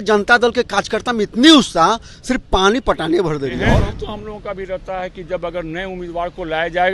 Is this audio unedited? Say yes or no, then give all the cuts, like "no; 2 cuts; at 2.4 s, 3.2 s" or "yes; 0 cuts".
no; 1 cut; at 3.7 s